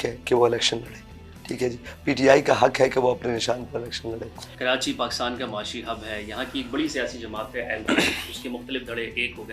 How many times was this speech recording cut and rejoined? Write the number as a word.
zero